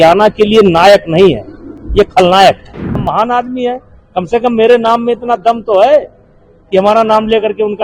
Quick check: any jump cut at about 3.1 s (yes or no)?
yes